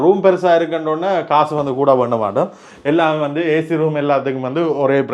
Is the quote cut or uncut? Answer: uncut